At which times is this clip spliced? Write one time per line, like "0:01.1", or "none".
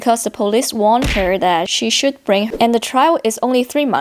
0:02.5